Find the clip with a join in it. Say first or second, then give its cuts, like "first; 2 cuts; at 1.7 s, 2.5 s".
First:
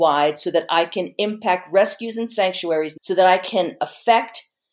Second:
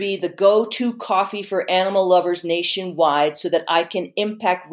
first; 2 cuts; at 2.9 s, 3.5 s